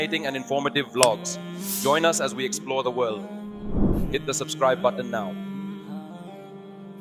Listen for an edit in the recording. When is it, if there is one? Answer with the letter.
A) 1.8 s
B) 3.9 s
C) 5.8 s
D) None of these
D